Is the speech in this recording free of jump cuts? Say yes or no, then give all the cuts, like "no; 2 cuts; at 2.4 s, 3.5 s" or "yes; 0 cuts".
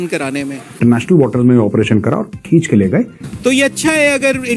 no; 2 cuts; at 0.8 s, 3.2 s